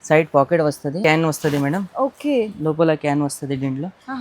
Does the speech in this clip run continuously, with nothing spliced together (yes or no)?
no